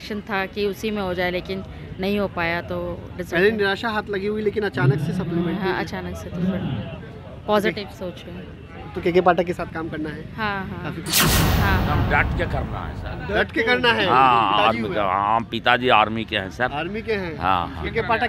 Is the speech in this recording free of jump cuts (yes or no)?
yes